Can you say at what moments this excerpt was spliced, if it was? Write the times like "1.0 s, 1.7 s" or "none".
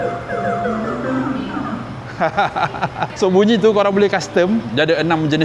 none